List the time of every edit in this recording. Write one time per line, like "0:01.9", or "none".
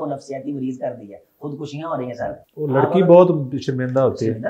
0:02.4